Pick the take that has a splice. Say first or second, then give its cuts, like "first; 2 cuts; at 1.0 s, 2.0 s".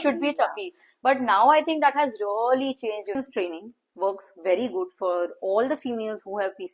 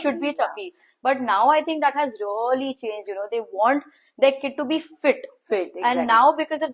first; 1 cut; at 3.2 s